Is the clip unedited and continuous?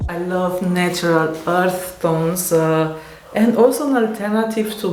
yes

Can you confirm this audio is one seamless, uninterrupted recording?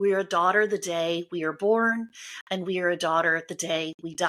yes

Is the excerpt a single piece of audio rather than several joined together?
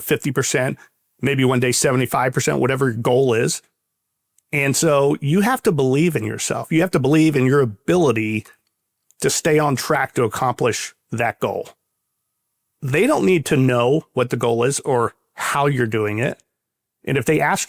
yes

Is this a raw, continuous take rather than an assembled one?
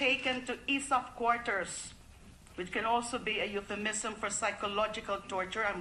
no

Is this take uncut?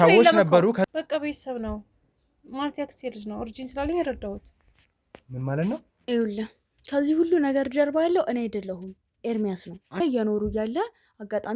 no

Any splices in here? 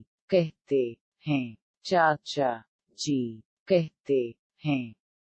no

